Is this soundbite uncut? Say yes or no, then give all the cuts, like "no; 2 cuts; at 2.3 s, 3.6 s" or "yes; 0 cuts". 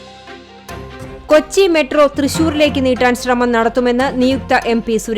no; 1 cut; at 1.1 s